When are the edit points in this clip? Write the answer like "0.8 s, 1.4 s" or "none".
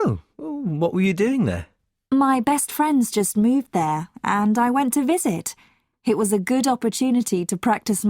1.2 s